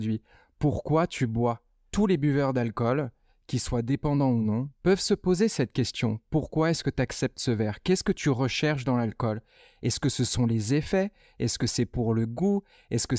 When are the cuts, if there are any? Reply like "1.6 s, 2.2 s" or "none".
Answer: 1.7 s